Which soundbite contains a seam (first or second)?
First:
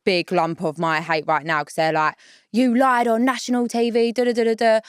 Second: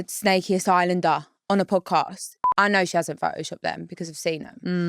second